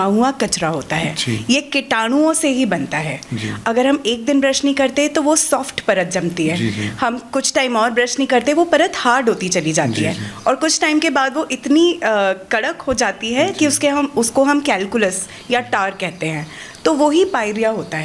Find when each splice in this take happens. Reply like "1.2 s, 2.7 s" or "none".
none

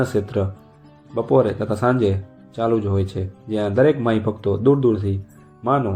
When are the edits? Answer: none

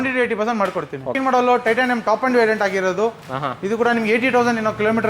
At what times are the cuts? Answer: 1.2 s

